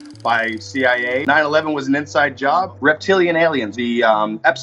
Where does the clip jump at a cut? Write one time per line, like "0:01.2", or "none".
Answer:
0:01.2
0:02.8